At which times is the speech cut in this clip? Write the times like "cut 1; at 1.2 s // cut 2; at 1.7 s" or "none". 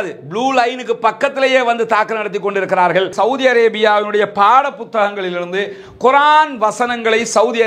cut 1; at 3.1 s